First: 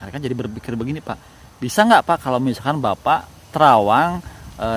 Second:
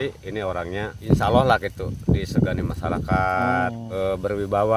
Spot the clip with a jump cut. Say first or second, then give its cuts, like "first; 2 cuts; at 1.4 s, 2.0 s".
second; 2 cuts; at 1.0 s, 3.8 s